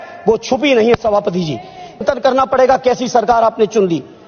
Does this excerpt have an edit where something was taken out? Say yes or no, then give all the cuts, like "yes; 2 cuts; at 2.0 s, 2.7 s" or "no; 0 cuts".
yes; 1 cut; at 2.0 s